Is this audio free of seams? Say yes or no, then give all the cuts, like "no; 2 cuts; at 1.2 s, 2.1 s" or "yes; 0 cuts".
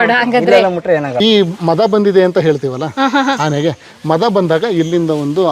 no; 1 cut; at 1.2 s